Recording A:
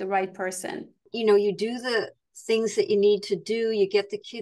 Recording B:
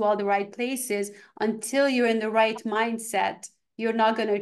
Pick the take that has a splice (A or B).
A